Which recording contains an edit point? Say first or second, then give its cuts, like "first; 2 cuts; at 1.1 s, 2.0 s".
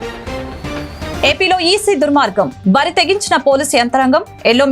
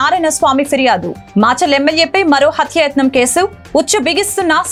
first; 1 cut; at 1.1 s